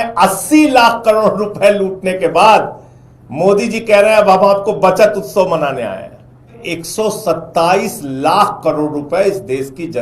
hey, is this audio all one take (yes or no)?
no